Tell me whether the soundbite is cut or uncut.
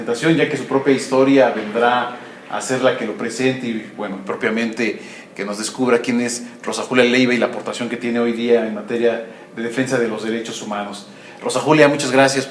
cut